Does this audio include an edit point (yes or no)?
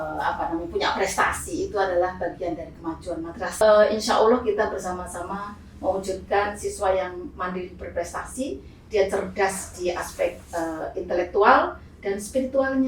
yes